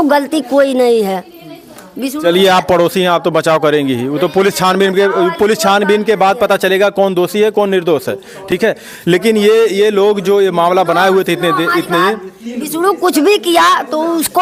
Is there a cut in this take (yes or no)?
no